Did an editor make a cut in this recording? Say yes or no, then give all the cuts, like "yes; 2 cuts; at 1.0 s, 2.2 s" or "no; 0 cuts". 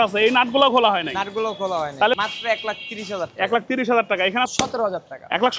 yes; 2 cuts; at 2.1 s, 4.5 s